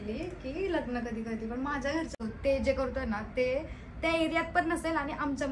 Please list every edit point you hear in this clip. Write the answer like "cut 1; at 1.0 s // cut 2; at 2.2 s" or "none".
cut 1; at 2.1 s